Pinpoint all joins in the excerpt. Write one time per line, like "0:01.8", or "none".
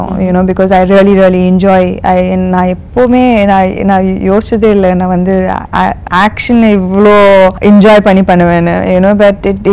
0:06.0
0:07.6